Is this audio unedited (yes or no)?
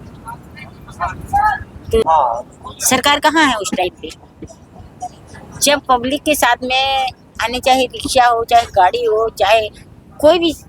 no